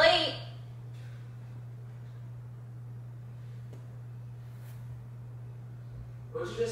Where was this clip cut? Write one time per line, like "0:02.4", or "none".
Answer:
none